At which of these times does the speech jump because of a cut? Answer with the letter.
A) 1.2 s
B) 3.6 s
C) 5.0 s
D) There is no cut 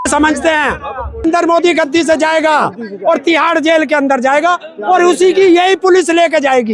A